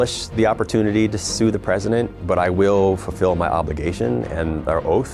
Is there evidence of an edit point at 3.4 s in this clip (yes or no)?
no